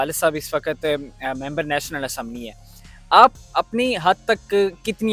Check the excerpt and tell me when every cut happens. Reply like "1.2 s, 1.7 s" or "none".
none